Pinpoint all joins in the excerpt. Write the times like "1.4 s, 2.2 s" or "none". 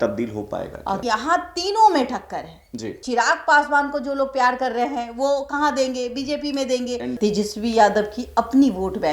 1.0 s, 3.0 s, 7.1 s